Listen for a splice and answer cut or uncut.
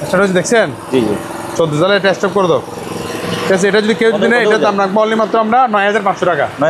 uncut